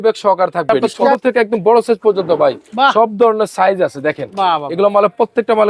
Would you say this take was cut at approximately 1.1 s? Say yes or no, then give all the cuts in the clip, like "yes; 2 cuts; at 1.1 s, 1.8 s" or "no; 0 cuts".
yes; 1 cut; at 1.1 s